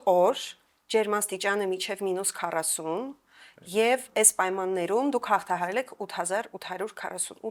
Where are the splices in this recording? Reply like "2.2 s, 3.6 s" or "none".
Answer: none